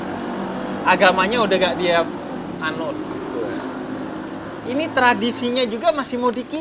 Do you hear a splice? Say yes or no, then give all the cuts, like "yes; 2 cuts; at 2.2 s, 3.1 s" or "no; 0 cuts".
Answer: no; 0 cuts